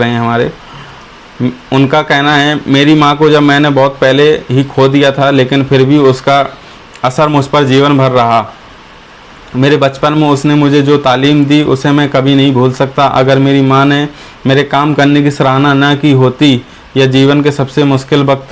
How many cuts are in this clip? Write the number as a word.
zero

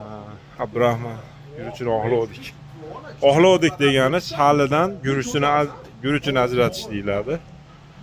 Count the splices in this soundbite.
zero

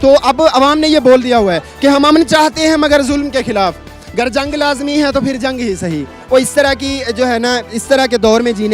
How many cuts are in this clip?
one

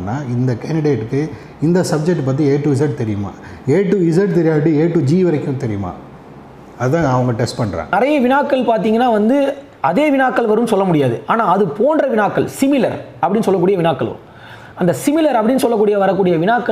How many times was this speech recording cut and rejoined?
zero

